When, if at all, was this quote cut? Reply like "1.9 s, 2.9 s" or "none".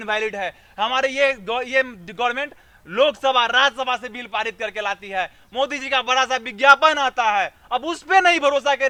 none